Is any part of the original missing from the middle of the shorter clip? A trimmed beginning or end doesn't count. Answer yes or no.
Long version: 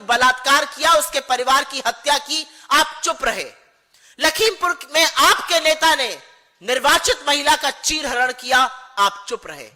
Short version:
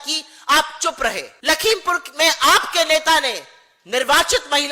yes